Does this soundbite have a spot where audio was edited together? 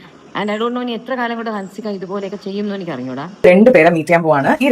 yes; 1 cut; at 3.3 s

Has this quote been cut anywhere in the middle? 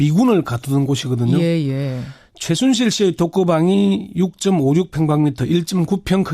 yes; 1 cut; at 1.0 s

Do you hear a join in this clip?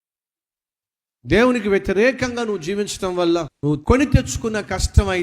yes; 1 cut; at 3.9 s

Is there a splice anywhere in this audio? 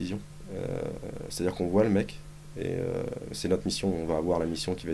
yes; 1 cut; at 3.3 s

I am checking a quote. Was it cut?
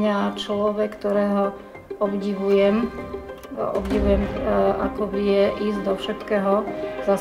no; 0 cuts

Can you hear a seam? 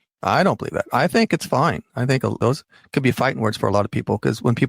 yes; 1 cut; at 2.4 s

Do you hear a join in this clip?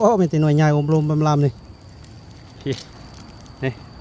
yes; 1 cut; at 3.0 s

